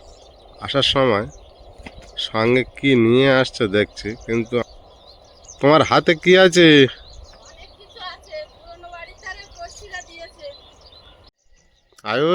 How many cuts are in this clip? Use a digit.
2